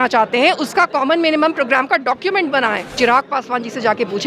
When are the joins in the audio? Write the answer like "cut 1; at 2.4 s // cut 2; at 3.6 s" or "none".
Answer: cut 1; at 2.9 s